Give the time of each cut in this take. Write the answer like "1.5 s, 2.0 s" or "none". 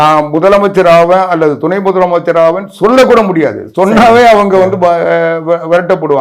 none